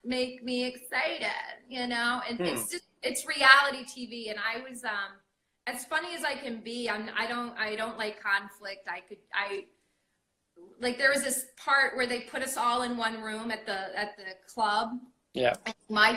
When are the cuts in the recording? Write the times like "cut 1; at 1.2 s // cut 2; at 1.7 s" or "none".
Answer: none